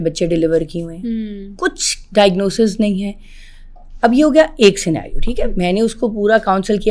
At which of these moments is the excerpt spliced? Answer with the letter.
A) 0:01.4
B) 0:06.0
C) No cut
C